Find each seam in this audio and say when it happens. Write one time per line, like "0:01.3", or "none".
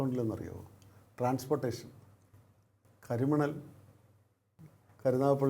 none